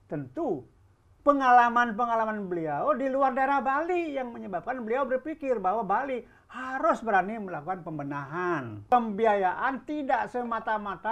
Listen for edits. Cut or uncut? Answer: cut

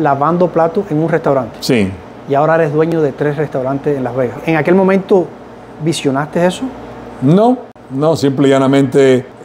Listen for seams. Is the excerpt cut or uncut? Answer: uncut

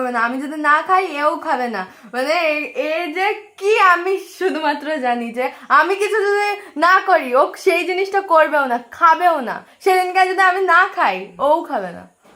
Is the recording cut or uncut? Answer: uncut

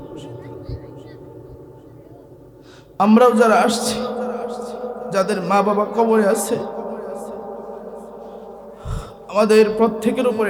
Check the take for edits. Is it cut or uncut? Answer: uncut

